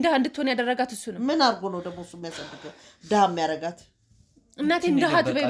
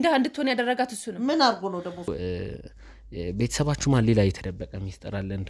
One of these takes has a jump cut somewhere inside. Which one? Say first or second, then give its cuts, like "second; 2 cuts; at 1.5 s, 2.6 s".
second; 1 cut; at 2.1 s